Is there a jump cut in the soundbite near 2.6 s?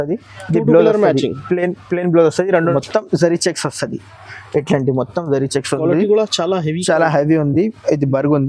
yes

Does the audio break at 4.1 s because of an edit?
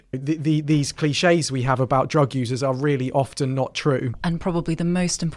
yes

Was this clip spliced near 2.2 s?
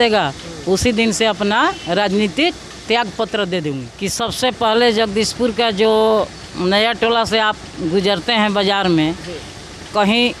no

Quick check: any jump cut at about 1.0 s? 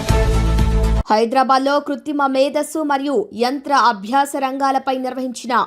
yes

